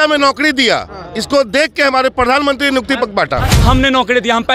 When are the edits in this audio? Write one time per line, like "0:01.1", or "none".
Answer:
0:03.5